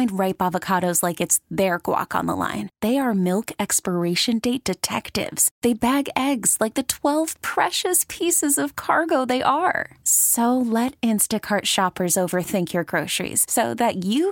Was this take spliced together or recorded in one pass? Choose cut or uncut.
uncut